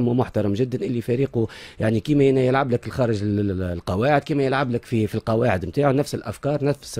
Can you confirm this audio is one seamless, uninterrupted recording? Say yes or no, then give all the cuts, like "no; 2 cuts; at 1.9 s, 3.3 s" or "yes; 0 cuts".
yes; 0 cuts